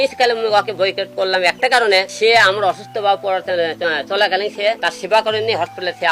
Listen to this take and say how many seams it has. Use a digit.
2